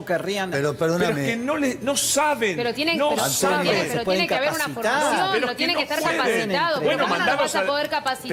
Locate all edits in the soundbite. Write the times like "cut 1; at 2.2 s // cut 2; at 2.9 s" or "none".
none

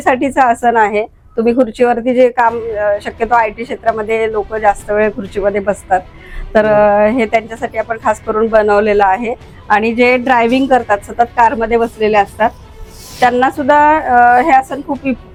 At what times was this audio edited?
none

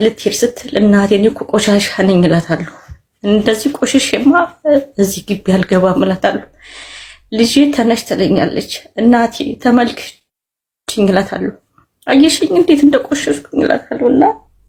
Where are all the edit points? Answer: none

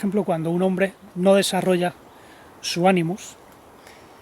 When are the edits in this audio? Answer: none

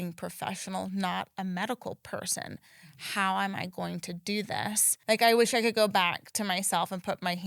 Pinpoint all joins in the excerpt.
cut 1; at 5.0 s

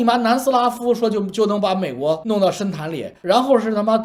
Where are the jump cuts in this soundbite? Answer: none

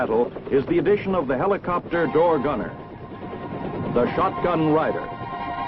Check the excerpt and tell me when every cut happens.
cut 1; at 4.6 s

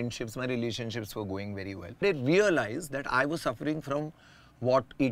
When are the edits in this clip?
cut 1; at 2.0 s

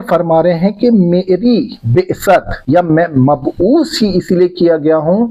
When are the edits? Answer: cut 1; at 2.5 s

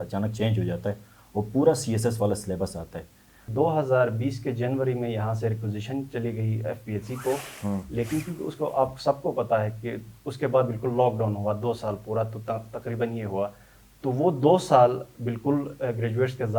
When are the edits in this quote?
cut 1; at 3.4 s

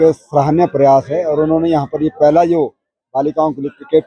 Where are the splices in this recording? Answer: none

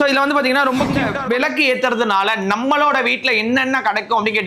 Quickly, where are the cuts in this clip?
cut 1; at 1.1 s

